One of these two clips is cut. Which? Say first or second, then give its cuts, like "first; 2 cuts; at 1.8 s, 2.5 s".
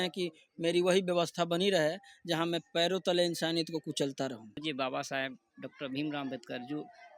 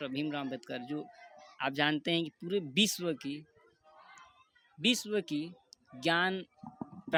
first; 1 cut; at 4.6 s